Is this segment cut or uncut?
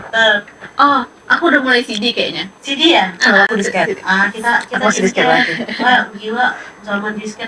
uncut